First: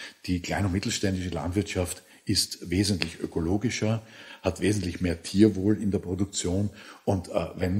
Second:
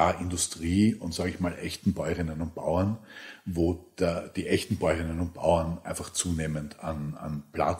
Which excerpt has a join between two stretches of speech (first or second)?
first